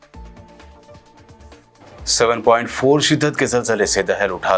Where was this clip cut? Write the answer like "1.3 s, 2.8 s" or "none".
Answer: 1.3 s